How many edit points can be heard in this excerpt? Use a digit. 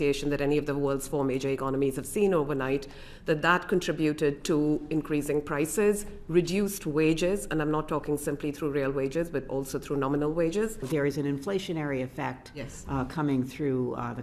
1